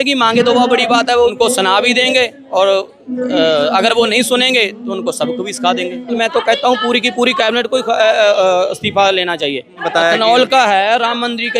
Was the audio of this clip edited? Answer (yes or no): yes